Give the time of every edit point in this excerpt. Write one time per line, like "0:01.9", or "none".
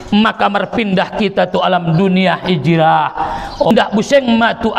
0:03.7